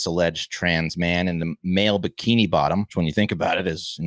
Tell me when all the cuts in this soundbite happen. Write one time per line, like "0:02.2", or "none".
0:02.9